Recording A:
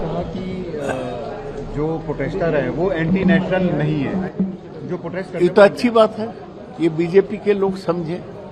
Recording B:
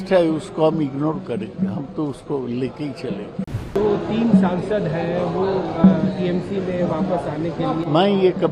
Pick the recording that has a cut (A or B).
B